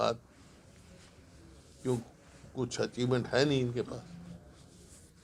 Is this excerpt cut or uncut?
uncut